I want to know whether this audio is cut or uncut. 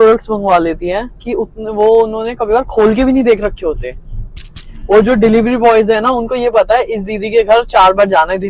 uncut